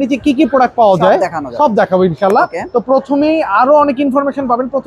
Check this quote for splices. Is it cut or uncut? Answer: uncut